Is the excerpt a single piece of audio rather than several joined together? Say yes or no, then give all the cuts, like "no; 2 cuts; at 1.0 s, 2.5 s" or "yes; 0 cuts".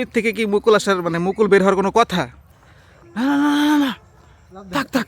no; 1 cut; at 2.4 s